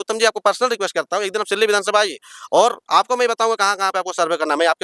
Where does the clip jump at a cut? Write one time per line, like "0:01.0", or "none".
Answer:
none